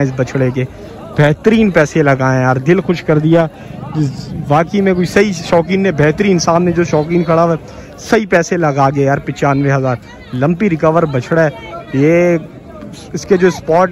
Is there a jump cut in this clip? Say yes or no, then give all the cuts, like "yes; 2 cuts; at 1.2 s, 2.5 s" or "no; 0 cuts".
no; 0 cuts